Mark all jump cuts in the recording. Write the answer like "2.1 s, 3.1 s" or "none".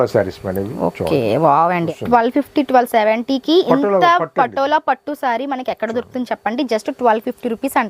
1.9 s